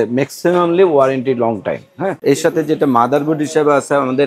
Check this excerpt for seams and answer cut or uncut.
cut